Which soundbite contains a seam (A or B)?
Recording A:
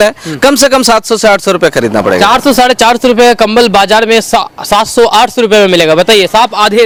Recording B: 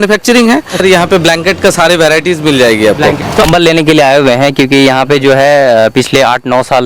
B